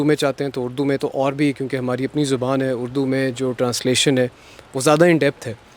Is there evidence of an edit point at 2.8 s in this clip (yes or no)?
no